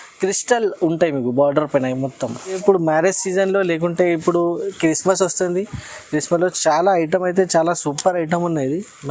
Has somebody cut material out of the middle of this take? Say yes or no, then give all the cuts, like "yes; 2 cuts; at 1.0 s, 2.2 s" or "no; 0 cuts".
yes; 1 cut; at 2.6 s